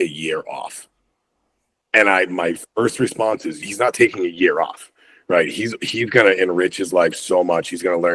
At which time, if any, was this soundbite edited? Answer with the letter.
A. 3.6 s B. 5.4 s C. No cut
A